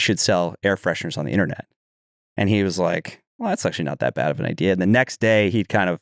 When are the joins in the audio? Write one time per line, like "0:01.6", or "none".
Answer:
none